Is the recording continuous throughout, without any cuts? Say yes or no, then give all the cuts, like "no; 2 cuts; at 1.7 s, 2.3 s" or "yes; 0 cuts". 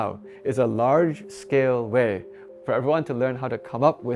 no; 1 cut; at 2.4 s